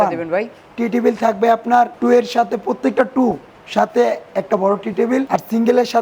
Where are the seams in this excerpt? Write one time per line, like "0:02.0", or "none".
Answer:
0:01.9
0:05.3